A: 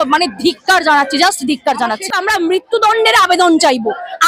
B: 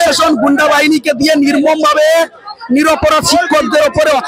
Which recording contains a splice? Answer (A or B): A